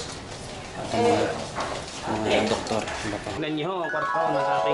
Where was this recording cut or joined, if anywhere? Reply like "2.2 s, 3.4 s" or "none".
3.5 s